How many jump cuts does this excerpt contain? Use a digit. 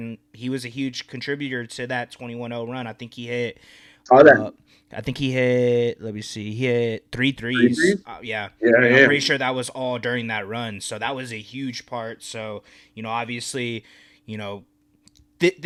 0